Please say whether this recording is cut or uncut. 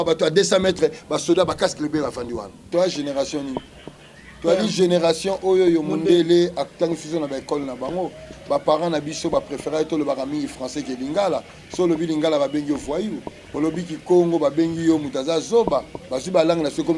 cut